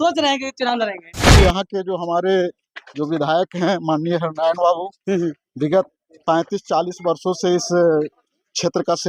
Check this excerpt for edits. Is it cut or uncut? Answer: cut